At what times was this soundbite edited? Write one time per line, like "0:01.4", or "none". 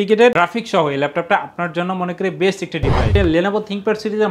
0:03.1